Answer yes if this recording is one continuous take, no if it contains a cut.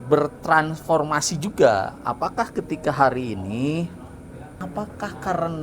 no